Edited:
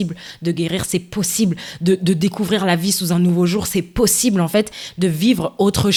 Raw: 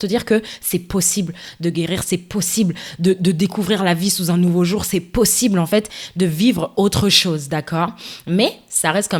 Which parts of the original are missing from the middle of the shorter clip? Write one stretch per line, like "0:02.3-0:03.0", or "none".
none

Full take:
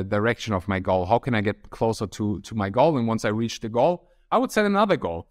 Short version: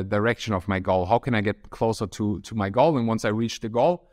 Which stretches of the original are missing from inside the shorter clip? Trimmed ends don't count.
none

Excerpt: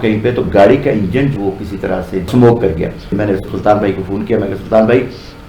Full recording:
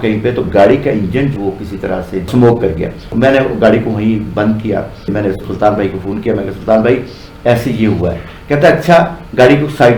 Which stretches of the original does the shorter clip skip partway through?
0:03.0-0:05.0

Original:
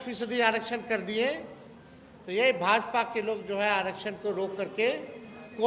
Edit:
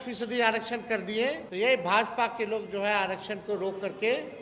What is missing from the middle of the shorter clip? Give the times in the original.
0:01.4-0:02.2

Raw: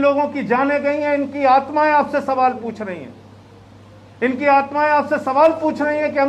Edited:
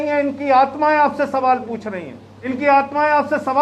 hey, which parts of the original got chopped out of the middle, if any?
0:03.4-0:04.3

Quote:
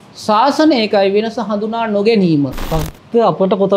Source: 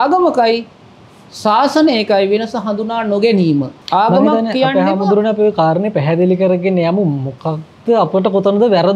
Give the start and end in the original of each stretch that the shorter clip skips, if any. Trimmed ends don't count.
0:03.8-0:07.3

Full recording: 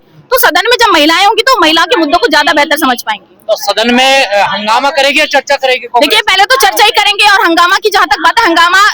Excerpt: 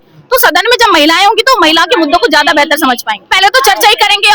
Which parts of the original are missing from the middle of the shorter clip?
0:03.3-0:06.2

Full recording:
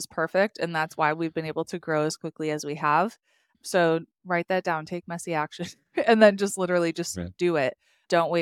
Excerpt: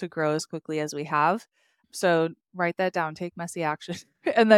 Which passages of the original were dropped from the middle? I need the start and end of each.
none

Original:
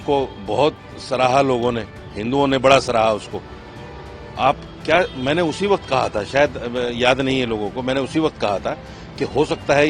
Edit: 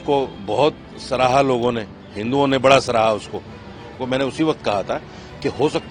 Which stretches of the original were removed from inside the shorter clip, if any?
0:04.0-0:07.7

